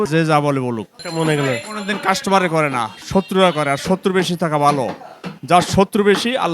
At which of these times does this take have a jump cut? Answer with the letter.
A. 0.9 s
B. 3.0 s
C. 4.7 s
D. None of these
A